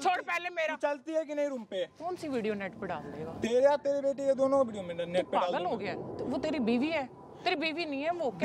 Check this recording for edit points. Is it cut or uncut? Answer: uncut